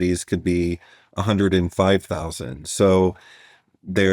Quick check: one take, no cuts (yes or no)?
yes